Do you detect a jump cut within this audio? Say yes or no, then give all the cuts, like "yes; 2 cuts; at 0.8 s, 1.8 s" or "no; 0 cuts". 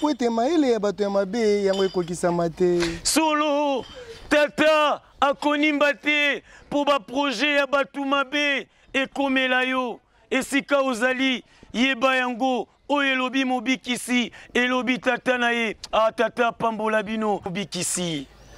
yes; 1 cut; at 17.5 s